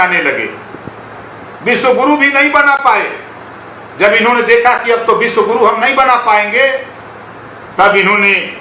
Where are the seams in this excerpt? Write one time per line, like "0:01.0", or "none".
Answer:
none